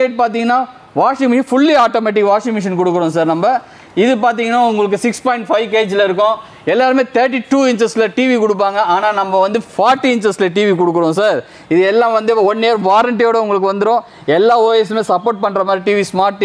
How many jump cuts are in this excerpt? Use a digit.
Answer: 0